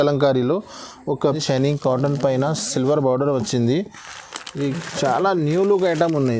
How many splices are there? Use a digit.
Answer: 1